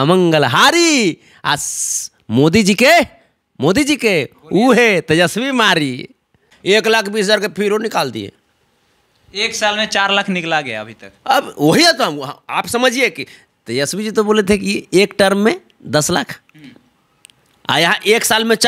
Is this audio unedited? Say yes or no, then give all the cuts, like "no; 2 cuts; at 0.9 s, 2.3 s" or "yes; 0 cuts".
no; 1 cut; at 6.5 s